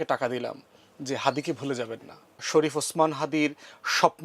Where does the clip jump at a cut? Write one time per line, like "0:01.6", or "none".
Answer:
0:02.4